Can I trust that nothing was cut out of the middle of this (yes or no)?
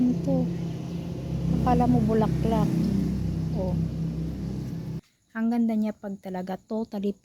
no